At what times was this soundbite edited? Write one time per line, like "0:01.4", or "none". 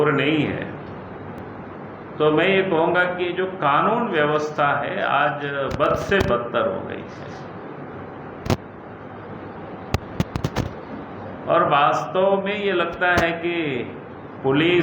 0:01.4